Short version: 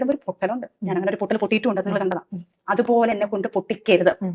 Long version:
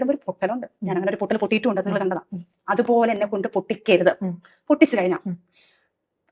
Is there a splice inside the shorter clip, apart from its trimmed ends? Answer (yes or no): no